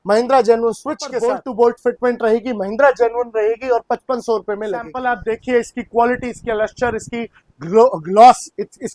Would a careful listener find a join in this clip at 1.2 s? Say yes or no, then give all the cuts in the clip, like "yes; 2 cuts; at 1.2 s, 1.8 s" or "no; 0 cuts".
yes; 2 cuts; at 1.2 s, 5.0 s